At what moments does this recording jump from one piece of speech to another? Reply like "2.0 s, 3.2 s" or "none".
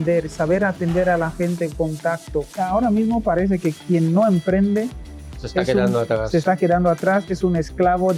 2.5 s